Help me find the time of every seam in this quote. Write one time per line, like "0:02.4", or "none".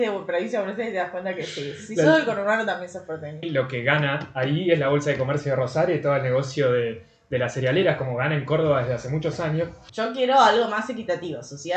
0:03.4
0:09.8